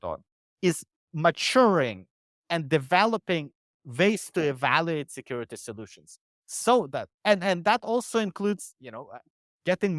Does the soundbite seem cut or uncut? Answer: uncut